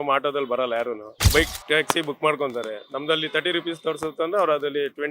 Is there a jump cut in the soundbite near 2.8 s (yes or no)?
no